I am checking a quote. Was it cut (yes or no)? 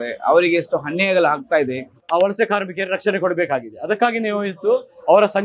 yes